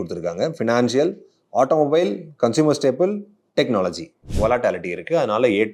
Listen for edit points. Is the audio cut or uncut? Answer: cut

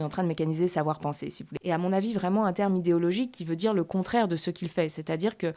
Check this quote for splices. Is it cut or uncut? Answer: cut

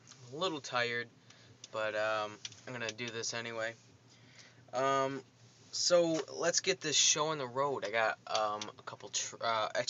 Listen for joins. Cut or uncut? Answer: cut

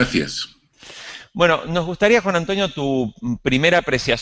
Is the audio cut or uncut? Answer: uncut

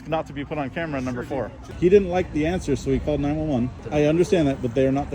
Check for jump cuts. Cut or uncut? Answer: cut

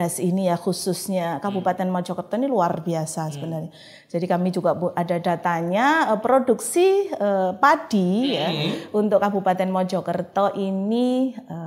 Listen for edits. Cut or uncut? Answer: uncut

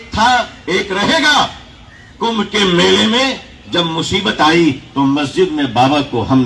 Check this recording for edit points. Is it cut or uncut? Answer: uncut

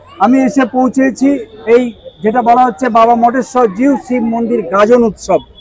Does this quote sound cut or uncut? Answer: cut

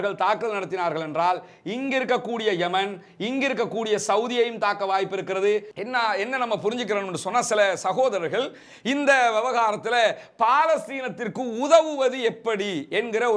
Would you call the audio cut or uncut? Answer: cut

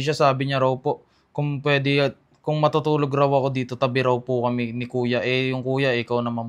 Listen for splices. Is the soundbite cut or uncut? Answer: uncut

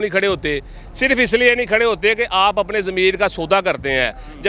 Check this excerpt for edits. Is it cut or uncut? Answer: uncut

